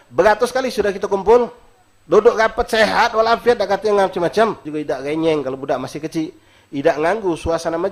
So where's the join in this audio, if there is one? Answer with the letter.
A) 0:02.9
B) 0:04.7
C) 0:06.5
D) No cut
B